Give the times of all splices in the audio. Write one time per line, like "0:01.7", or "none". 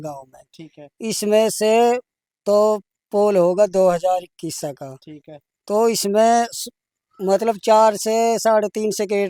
none